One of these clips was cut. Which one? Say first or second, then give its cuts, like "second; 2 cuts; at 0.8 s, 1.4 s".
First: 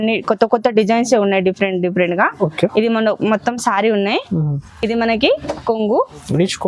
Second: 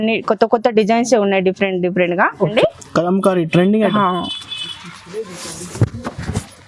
second; 1 cut; at 2.5 s